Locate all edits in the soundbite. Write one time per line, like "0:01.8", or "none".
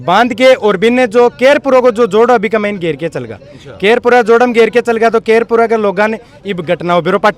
none

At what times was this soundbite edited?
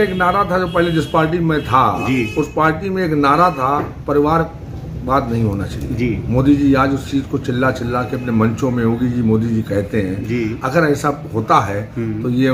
none

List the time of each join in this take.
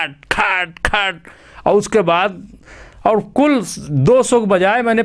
none

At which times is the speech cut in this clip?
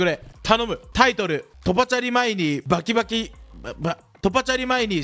0:04.1

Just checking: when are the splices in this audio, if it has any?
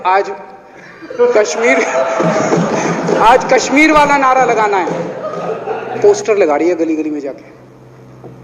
0:06.0

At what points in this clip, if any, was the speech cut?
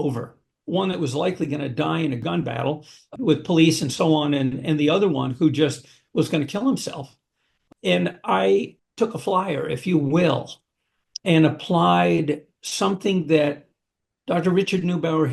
0:02.2

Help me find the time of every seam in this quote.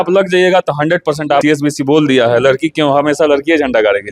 0:01.4

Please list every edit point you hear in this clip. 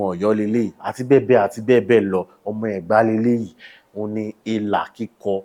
none

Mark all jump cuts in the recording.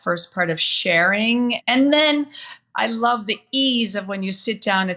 0:01.6

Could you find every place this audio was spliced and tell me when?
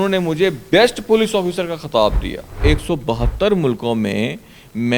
0:02.6

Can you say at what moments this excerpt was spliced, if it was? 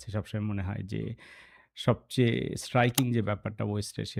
none

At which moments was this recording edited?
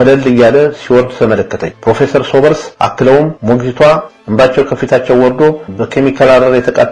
none

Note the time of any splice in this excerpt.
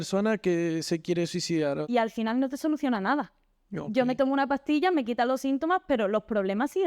0:01.8

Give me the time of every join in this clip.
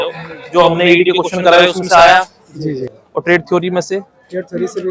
none

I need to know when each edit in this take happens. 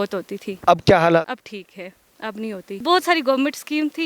0:01.3
0:02.8

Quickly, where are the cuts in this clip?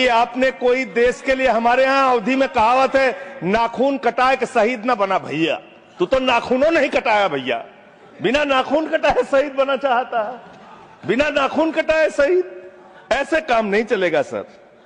none

